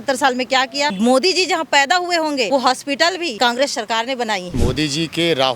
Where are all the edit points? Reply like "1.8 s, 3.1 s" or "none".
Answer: 0.9 s, 2.5 s, 3.3 s, 4.5 s

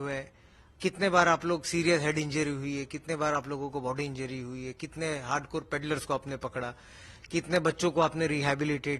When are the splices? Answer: none

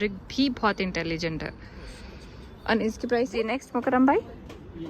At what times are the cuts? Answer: 3.4 s

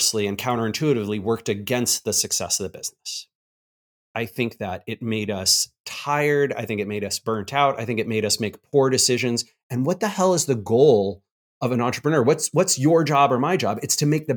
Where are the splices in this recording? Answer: none

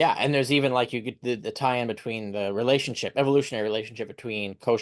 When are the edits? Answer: none

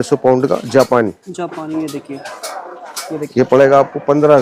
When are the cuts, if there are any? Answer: none

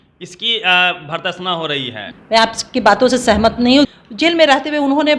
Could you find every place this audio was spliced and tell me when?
2.0 s, 3.9 s

